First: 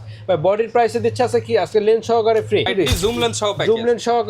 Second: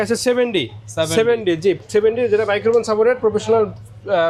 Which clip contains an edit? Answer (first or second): first